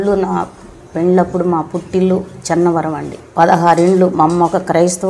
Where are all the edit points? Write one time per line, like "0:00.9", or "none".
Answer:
0:03.1